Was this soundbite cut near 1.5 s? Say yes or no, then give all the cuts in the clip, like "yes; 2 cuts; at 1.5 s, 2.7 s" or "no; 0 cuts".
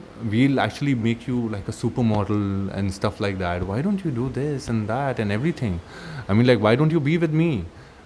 no; 0 cuts